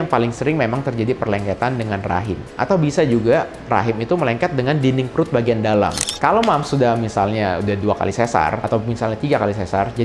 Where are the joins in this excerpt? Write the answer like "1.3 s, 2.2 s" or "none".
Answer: 6.0 s

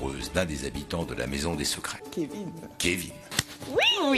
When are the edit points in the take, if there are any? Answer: 3.2 s

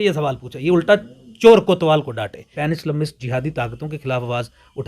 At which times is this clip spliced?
2.5 s

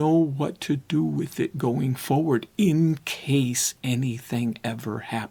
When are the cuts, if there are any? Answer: none

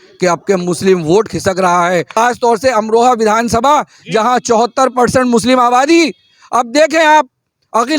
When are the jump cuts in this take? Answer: 2.1 s

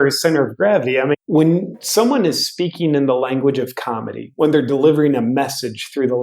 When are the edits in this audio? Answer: 1.1 s

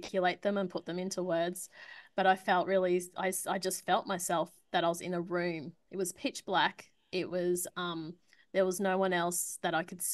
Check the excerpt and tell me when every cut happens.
none

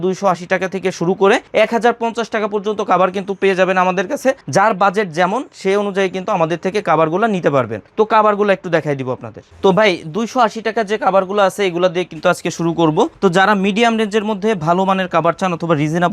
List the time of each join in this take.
none

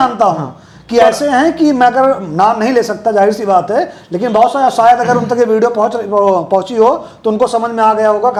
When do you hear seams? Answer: none

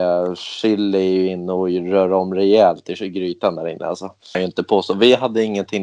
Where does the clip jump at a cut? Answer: 4.4 s

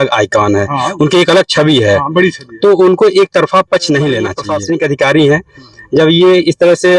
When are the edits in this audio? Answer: 4.5 s

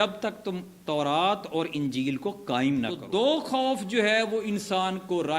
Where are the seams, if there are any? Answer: 3.0 s

